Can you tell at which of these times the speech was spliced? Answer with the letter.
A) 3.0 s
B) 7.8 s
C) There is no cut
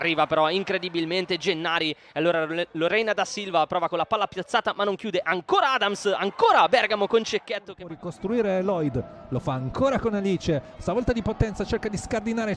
B